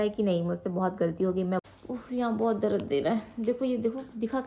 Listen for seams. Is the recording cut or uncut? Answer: cut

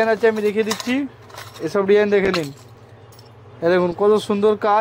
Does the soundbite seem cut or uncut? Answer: uncut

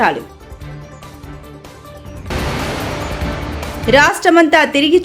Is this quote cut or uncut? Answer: cut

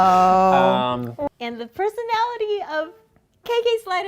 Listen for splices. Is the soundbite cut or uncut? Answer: cut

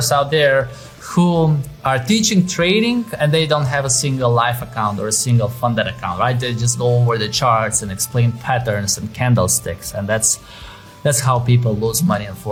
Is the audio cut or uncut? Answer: uncut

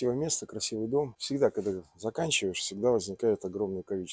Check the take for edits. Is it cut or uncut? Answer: cut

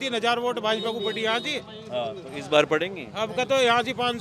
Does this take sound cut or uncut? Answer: uncut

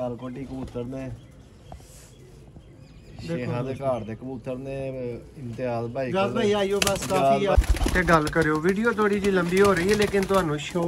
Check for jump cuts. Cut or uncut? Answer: cut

